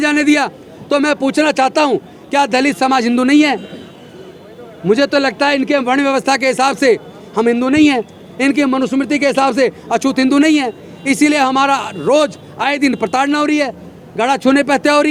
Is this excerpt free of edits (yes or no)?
yes